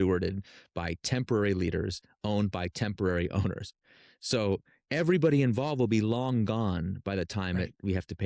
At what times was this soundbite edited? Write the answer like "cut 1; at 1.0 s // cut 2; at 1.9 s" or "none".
none